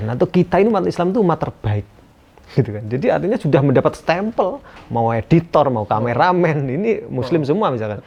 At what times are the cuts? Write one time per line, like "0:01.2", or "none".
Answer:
none